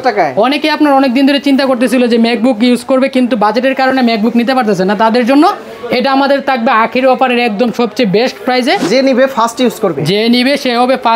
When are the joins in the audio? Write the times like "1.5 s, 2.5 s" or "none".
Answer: 8.9 s